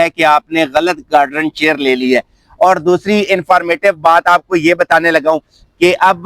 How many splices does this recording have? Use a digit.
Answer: 0